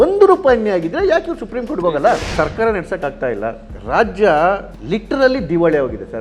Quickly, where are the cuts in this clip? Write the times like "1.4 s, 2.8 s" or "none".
2.1 s, 3.7 s, 4.7 s